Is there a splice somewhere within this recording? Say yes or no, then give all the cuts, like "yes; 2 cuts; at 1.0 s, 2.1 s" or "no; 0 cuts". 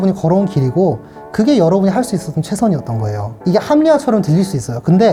no; 0 cuts